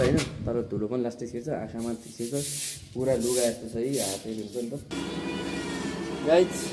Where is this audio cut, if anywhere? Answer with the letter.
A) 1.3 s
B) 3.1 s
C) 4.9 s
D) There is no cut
C